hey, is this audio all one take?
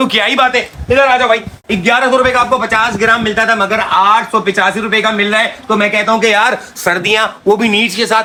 yes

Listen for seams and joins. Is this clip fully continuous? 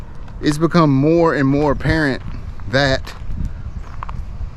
yes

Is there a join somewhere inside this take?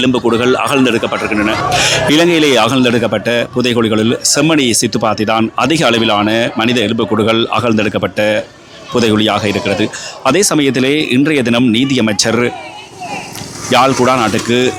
no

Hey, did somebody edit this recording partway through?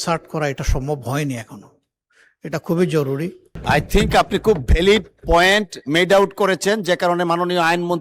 yes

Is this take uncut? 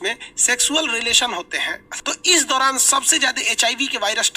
no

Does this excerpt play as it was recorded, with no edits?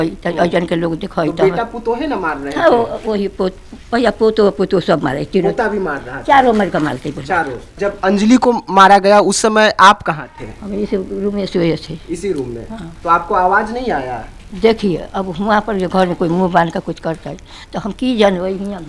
no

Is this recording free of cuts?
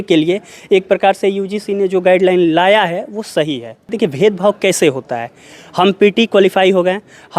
no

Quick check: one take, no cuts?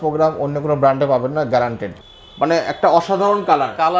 no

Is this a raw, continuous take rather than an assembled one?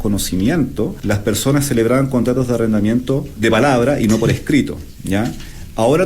no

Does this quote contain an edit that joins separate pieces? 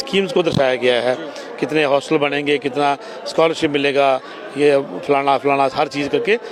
no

